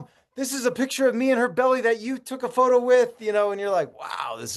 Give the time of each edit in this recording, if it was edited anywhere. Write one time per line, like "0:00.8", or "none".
none